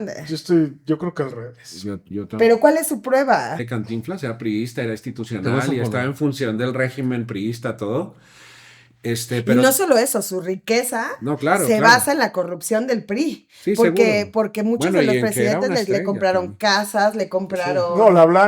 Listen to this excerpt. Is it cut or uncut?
cut